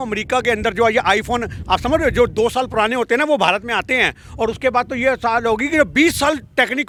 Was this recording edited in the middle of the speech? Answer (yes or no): no